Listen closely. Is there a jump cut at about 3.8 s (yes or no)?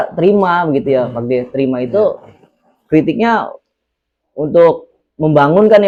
no